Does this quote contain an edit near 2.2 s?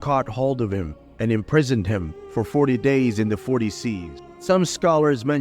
no; 1 cut; at 4.3 s

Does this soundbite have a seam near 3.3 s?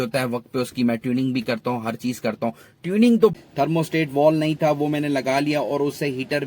yes; 1 cut; at 3.3 s

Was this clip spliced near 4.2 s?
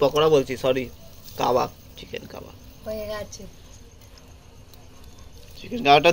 no; 0 cuts

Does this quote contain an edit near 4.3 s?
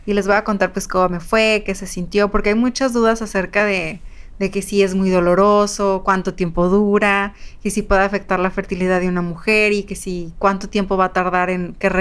no; 0 cuts

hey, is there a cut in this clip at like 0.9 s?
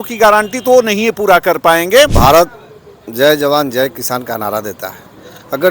no; 1 cut; at 2.1 s

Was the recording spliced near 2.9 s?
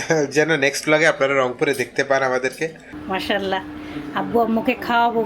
yes; 1 cut; at 2.9 s

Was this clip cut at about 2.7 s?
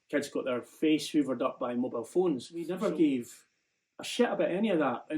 yes; 1 cut; at 2.7 s

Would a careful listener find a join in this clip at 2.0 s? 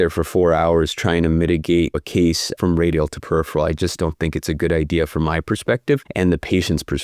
yes; 2 cuts; at 2.0 s, 6.1 s

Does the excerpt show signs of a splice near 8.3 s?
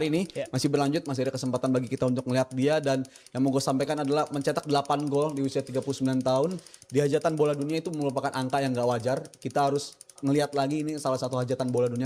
no; 0 cuts

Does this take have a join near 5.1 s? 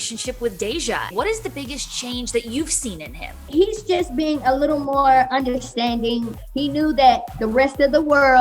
no; 3 cuts; at 1.1 s, 3.4 s, 6.4 s

